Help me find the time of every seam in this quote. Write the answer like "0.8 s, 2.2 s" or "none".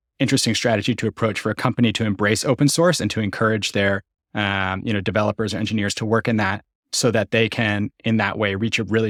none